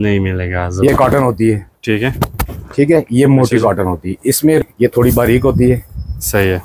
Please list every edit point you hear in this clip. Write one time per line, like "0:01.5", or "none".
0:00.9
0:04.6